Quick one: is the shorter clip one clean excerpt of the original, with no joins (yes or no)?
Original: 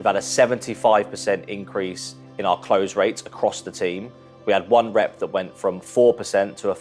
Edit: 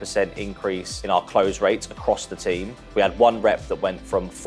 no